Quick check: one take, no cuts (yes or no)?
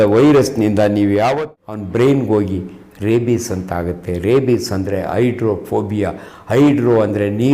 no